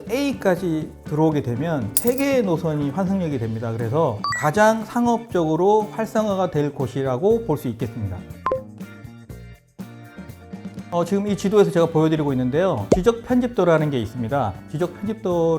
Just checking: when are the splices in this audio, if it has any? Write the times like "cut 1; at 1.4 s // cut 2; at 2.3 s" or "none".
none